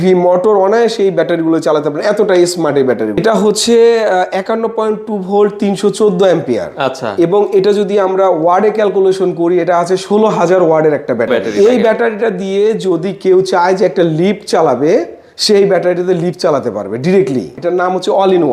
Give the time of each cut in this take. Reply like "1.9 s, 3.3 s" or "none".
3.2 s, 11.4 s, 17.6 s